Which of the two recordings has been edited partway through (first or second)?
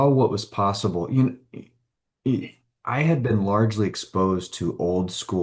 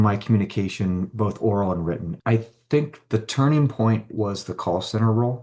second